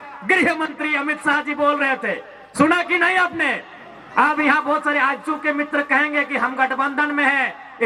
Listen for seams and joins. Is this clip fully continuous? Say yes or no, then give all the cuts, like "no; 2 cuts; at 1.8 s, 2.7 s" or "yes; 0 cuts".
yes; 0 cuts